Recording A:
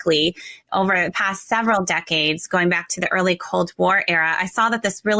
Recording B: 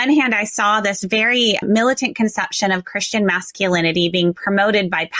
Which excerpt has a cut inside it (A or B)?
B